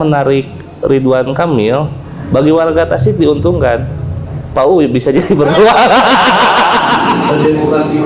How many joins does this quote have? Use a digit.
1